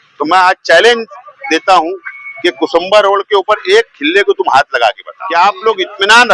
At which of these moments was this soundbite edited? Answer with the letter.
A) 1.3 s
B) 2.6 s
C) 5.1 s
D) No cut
C